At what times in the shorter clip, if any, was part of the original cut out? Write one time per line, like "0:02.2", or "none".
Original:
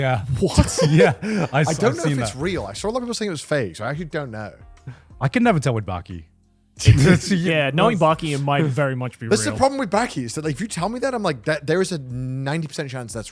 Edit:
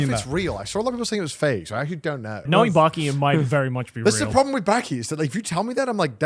0:02.5